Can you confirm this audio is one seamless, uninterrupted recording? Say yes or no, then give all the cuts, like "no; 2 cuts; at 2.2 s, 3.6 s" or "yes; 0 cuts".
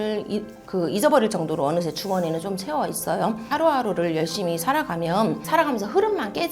no; 2 cuts; at 3.4 s, 5.4 s